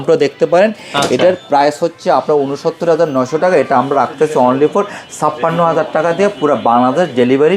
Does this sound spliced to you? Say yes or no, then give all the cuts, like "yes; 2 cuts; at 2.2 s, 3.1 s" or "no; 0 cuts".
no; 0 cuts